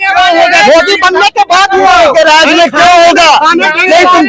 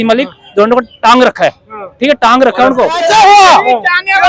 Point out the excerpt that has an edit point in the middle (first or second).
second